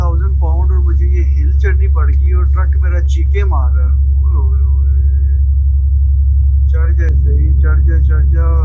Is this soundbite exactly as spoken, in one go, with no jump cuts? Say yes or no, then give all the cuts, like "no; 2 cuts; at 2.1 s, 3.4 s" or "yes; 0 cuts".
yes; 0 cuts